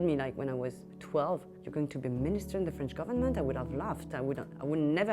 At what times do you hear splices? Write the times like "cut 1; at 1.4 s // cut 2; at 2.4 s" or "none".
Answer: cut 1; at 0.9 s // cut 2; at 1.6 s